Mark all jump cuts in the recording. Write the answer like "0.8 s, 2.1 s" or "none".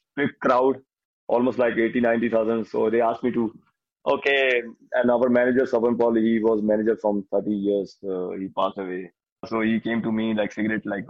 9.5 s